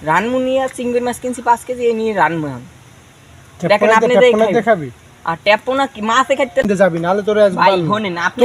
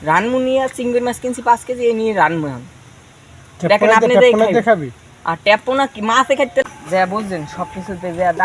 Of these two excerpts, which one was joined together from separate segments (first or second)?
first